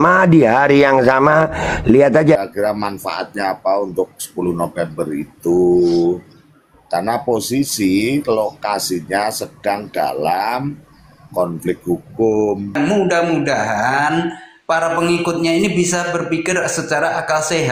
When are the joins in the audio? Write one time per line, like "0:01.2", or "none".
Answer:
0:02.4
0:12.7

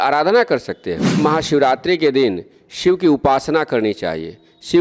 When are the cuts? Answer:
0:01.2

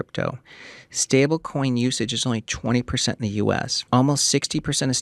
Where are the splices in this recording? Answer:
0:03.8

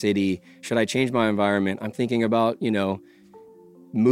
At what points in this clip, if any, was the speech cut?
none

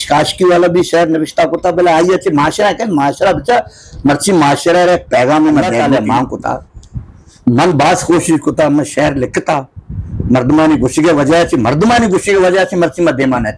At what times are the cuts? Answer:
0:05.8

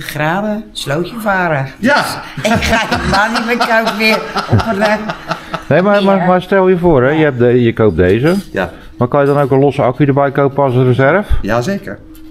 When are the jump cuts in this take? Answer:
none

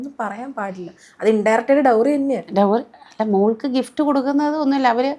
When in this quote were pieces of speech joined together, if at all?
none

